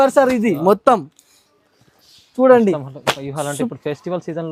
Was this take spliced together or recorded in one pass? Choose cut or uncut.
uncut